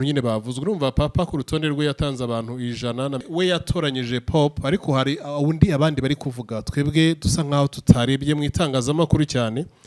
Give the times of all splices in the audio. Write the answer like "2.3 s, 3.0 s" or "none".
3.2 s